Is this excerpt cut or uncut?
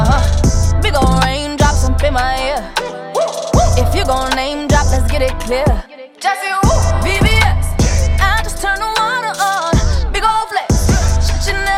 uncut